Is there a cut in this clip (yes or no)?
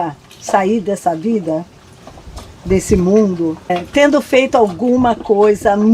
yes